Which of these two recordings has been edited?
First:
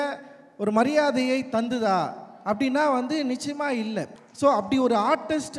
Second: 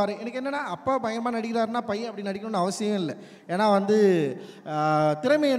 first; 1 cut; at 4.1 s

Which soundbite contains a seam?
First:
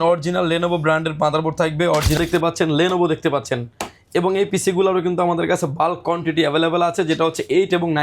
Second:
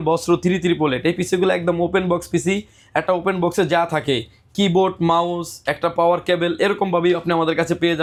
first; 1 cut; at 2.2 s

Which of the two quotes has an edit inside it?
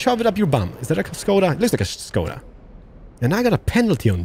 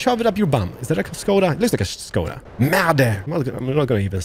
second; 2 cuts; at 2.4 s, 3.2 s

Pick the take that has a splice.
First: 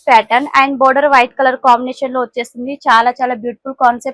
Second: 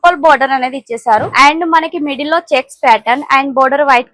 second; 1 cut; at 1.3 s

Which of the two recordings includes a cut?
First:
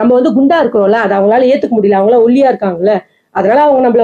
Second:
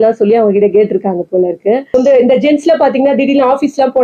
second; 1 cut; at 1.9 s

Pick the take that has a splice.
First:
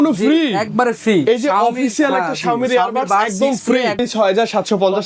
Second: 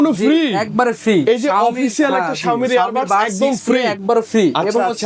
first; 1 cut; at 4.0 s

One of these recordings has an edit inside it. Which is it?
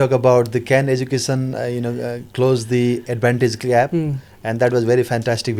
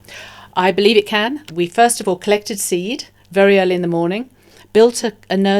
second; 1 cut; at 1.5 s

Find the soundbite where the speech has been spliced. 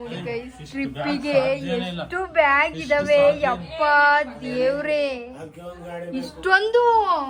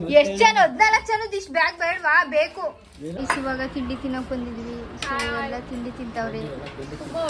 second; 1 cut; at 3.1 s

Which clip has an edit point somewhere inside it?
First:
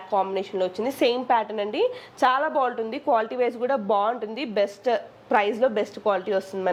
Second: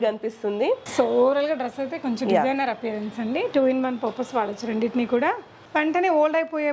second; 1 cut; at 5.5 s

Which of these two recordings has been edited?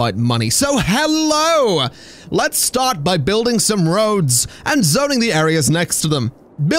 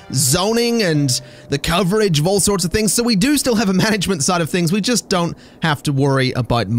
second; 1 cut; at 5.1 s

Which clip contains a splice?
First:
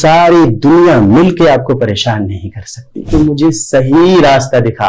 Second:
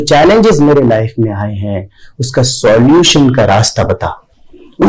first; 1 cut; at 3.1 s

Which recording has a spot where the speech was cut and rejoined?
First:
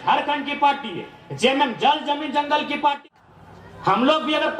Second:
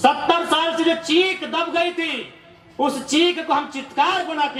first; 1 cut; at 3.0 s

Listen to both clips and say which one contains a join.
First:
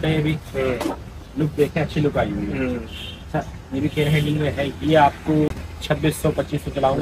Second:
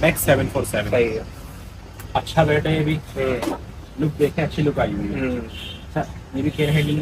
first; 1 cut; at 5.5 s

